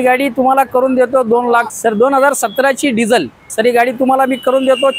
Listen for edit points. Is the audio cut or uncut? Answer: cut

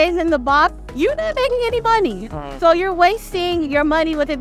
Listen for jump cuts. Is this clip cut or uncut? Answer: uncut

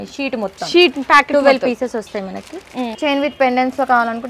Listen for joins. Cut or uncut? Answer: cut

